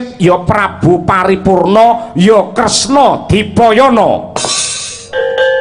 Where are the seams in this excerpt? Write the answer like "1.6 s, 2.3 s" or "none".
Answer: none